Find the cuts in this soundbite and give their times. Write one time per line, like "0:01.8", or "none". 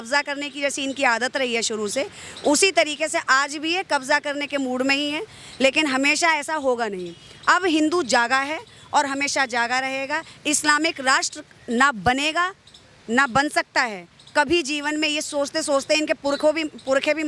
none